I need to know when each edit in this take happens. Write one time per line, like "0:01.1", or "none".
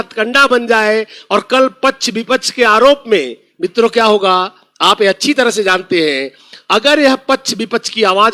none